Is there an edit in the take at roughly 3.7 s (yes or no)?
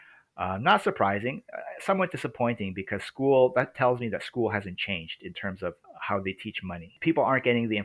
no